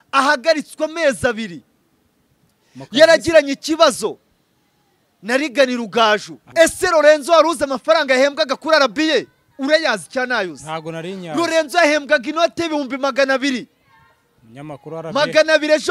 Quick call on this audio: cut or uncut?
cut